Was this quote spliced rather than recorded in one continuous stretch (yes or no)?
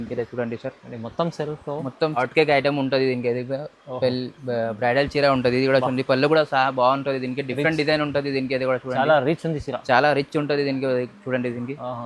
yes